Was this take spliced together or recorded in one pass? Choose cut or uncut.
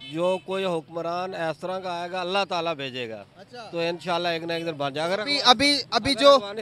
uncut